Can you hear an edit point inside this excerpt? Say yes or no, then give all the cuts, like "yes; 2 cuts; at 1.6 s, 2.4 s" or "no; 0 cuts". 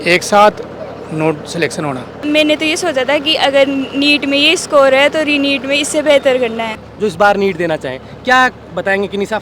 yes; 2 cuts; at 2.2 s, 6.8 s